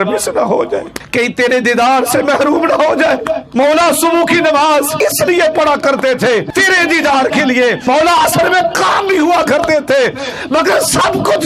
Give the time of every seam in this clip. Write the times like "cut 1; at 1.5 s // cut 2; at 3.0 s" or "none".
cut 1; at 1.0 s // cut 2; at 3.4 s // cut 3; at 4.9 s // cut 4; at 6.5 s // cut 5; at 7.8 s